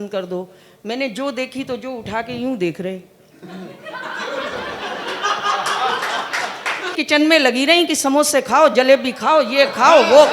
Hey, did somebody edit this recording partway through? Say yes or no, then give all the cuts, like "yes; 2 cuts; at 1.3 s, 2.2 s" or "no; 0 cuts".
yes; 1 cut; at 7.0 s